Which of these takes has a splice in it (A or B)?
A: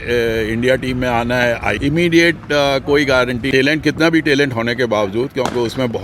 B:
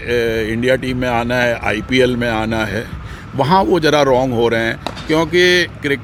A